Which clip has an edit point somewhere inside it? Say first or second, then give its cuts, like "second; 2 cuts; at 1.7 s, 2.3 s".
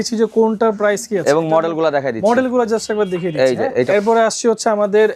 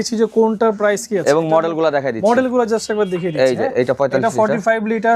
first; 1 cut; at 3.9 s